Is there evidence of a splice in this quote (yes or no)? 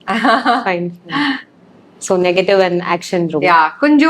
no